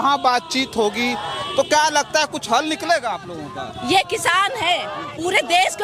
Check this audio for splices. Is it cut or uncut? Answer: uncut